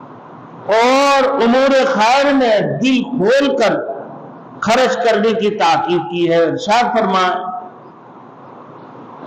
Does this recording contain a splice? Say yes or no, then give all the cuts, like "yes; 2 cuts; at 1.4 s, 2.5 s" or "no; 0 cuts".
no; 0 cuts